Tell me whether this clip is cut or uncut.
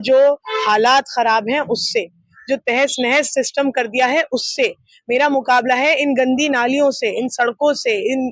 uncut